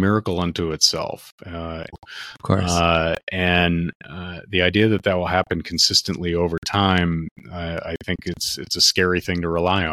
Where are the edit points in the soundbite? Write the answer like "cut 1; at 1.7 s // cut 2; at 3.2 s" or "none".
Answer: cut 1; at 1.9 s